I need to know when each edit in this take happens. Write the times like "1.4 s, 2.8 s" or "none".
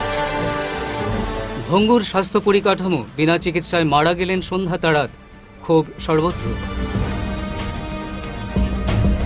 1.1 s